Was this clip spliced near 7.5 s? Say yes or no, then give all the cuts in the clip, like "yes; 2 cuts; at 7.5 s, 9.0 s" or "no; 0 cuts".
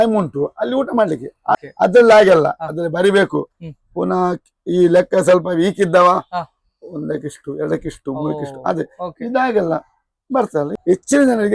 no; 2 cuts; at 1.6 s, 10.7 s